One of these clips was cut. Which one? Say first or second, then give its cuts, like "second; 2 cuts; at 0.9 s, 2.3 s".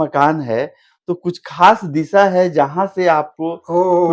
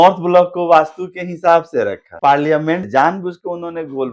second; 2 cuts; at 2.1 s, 2.9 s